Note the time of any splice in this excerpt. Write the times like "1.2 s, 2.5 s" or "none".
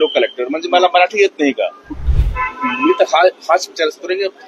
2.0 s